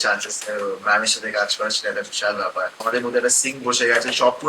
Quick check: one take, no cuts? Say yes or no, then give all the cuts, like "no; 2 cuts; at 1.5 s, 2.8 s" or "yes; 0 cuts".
no; 1 cut; at 2.9 s